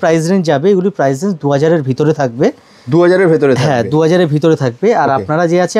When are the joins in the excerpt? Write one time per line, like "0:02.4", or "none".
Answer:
none

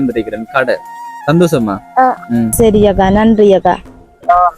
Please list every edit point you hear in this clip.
0:02.5

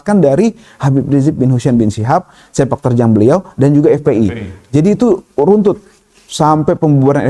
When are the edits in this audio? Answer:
none

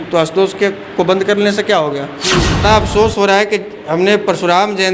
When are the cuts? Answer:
0:02.6

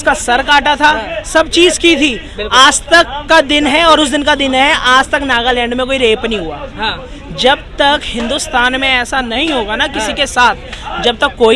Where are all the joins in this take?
none

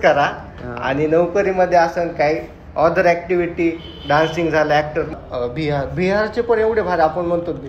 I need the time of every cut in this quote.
0:05.1

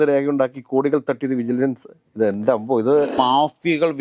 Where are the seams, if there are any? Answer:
0:03.1

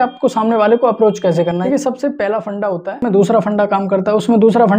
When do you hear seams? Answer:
0:01.6
0:03.1

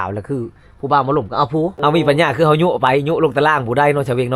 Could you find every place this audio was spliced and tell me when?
0:01.8

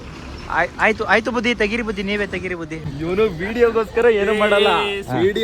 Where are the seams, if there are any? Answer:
0:02.8

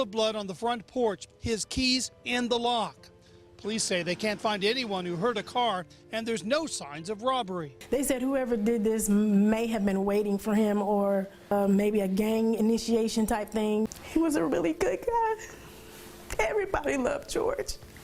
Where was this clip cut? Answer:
0:13.9

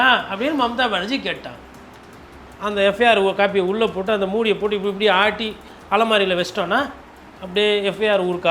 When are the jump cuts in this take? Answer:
0:02.5

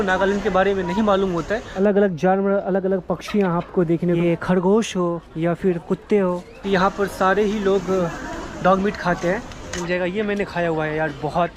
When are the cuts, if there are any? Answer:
0:01.7
0:04.2
0:06.5
0:09.7

